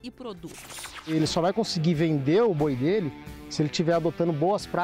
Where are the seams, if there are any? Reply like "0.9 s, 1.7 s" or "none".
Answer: 1.1 s